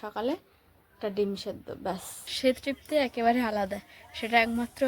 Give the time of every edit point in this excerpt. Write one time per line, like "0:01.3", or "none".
0:02.3